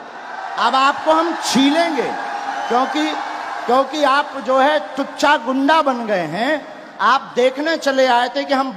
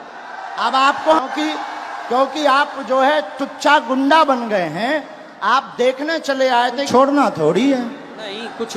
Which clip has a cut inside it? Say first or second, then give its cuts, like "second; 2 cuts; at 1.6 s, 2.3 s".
second; 2 cuts; at 1.2 s, 6.9 s